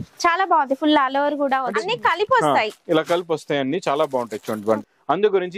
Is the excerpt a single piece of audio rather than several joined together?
no; 2 cuts; at 1.8 s, 4.8 s

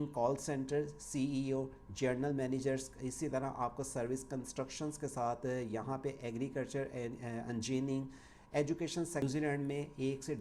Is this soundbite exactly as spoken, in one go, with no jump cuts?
no; 1 cut; at 9.2 s

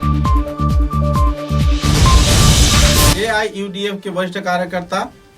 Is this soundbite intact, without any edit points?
no; 1 cut; at 3.1 s

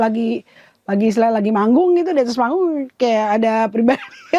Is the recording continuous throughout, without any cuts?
yes; 0 cuts

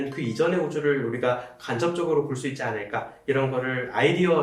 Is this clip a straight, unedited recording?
yes; 0 cuts

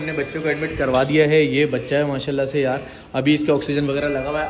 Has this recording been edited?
no; 0 cuts

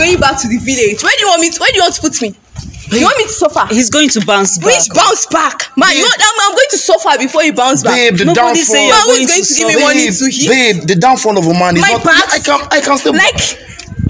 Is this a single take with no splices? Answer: yes; 0 cuts

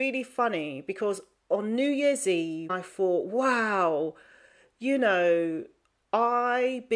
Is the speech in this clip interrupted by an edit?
yes; 1 cut; at 2.8 s

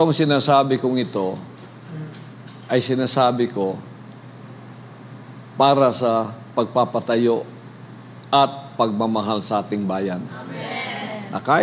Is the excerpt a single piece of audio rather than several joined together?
yes; 0 cuts

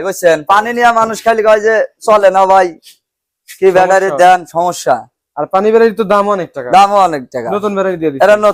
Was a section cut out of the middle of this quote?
no; 0 cuts

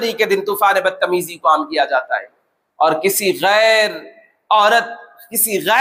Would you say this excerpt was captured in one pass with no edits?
yes; 0 cuts

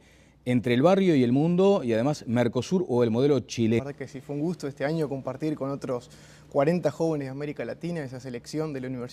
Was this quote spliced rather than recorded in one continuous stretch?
no; 0 cuts

